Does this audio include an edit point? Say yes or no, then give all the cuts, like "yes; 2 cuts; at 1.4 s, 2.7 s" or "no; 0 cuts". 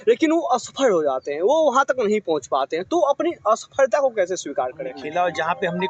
yes; 1 cut; at 5.0 s